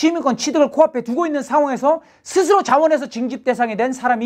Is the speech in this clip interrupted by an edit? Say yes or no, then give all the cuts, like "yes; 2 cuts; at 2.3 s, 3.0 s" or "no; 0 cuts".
no; 0 cuts